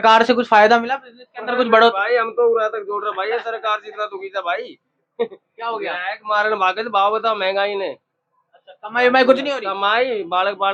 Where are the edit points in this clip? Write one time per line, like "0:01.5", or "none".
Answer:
none